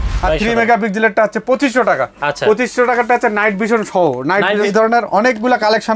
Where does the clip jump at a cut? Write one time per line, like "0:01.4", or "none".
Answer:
0:04.7